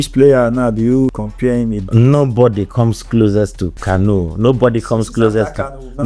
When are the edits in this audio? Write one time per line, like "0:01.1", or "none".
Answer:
0:01.2
0:03.7